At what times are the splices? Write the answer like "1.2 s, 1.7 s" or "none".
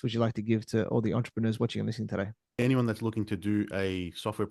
2.6 s